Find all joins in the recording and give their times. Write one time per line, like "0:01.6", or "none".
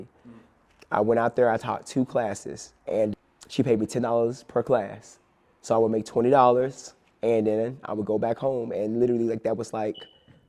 0:03.1

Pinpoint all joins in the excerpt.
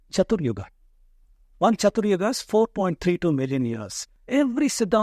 0:04.1

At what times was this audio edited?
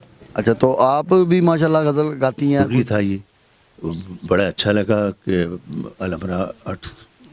0:02.7

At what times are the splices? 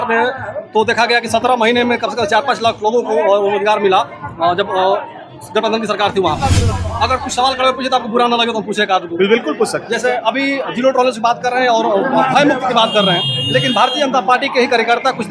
0:06.7

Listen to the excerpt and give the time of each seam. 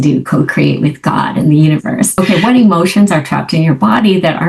0:02.1

